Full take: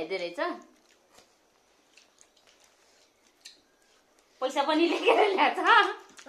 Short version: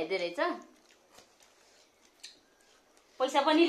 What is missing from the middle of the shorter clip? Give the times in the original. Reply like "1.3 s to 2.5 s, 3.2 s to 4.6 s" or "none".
1.4 s to 2.6 s

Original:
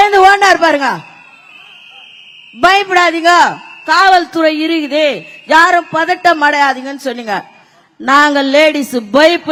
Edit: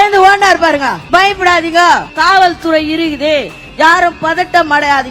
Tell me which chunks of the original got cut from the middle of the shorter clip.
1.0 s to 2.5 s, 3.6 s to 3.8 s

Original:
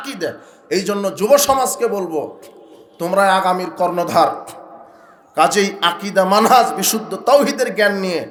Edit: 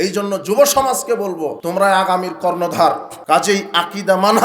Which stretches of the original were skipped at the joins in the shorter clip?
2.3 s to 3.0 s, 4.5 s to 5.2 s

